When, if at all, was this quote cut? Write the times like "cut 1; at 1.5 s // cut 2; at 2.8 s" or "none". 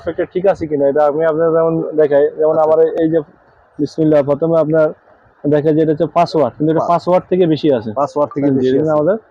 none